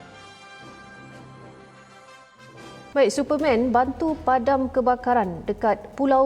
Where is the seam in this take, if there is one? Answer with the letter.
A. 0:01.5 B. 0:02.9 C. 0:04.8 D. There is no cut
B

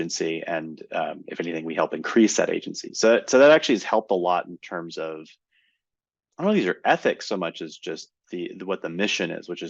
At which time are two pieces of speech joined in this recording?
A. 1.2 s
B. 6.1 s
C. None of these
C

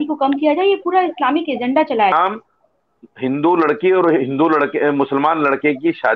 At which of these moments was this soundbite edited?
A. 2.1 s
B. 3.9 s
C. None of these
A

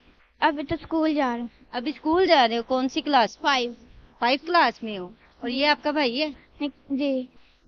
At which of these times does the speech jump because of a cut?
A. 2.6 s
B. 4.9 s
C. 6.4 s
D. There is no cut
D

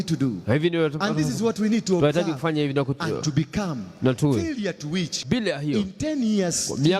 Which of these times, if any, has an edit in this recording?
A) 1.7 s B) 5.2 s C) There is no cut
B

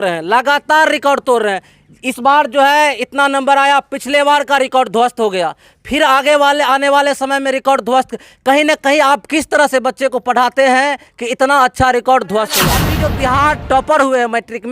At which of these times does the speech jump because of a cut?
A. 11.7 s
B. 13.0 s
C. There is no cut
B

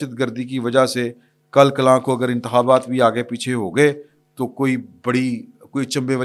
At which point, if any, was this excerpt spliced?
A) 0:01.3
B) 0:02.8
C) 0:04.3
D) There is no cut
D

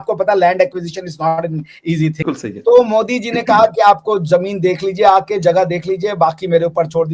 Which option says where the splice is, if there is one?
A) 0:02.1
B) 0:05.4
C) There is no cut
C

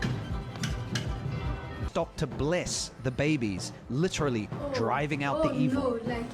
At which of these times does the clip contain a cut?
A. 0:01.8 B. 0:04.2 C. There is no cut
A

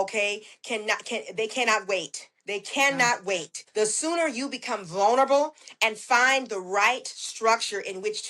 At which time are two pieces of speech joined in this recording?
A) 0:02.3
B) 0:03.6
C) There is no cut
B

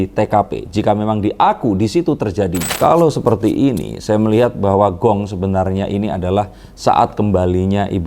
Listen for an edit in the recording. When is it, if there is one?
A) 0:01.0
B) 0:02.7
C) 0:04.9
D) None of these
B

